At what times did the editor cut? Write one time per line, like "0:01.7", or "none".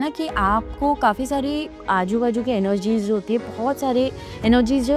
none